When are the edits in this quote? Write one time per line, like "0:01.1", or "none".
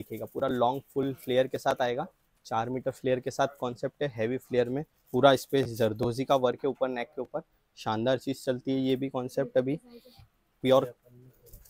none